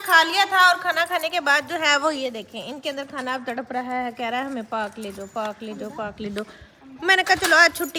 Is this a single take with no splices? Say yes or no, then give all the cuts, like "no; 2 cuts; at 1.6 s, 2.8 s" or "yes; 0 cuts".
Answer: yes; 0 cuts